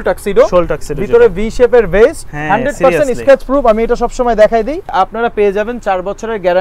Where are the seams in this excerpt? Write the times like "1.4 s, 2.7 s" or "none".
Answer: 2.3 s, 4.9 s

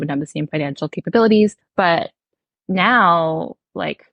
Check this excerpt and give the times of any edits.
1.6 s

